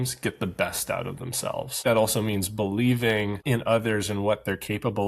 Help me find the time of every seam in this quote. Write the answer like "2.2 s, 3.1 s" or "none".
1.8 s, 3.4 s